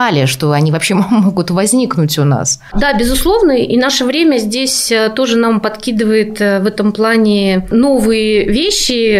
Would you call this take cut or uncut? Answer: uncut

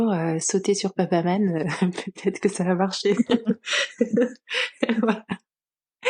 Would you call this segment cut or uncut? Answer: uncut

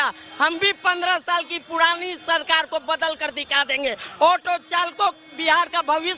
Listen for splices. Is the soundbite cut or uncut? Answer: uncut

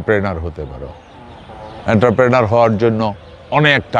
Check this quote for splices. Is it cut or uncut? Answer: uncut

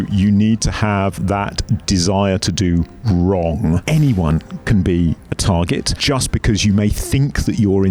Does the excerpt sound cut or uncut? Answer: cut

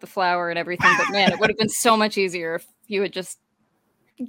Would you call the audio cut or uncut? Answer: uncut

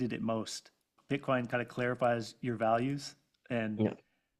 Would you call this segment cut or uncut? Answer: cut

